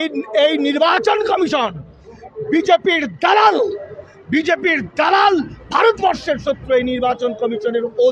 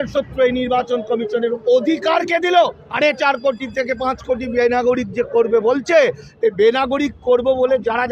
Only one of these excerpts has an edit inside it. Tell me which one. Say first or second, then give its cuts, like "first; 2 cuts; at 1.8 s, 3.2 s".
second; 1 cut; at 2.8 s